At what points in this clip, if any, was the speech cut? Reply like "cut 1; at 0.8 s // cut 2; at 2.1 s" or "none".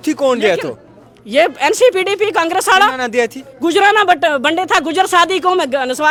none